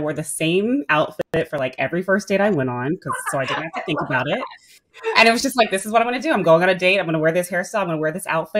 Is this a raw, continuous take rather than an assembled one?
yes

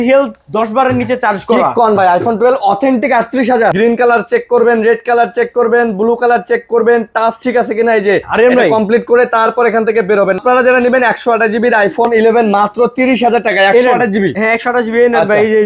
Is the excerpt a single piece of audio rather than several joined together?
no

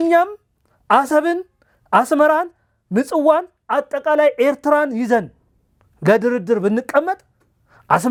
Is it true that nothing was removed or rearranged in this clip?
yes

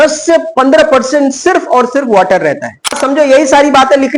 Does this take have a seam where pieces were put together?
yes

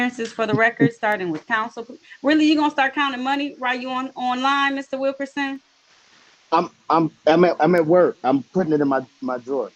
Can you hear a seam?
no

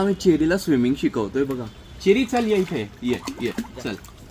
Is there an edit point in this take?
no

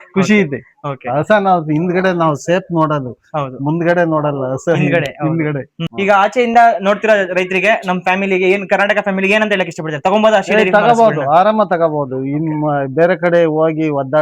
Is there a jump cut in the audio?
yes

